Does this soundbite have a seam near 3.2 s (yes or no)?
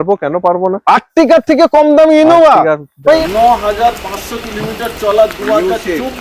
yes